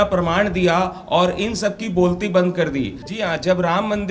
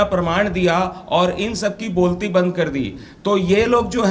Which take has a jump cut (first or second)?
first